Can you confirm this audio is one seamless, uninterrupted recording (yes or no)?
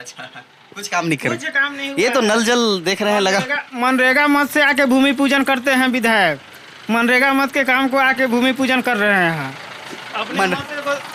yes